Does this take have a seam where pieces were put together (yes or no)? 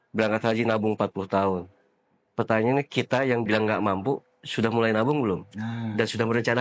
no